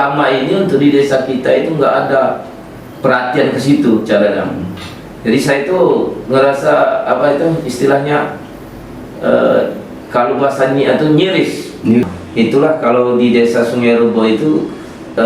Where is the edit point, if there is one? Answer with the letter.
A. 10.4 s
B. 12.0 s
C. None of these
B